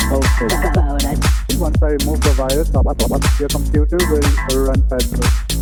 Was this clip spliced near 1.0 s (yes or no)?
no